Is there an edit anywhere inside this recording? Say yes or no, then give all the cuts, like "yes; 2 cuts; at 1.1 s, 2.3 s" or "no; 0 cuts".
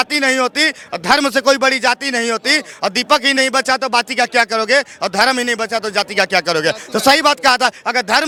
no; 0 cuts